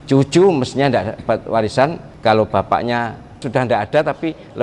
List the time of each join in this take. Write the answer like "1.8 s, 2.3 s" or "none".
2.1 s, 3.4 s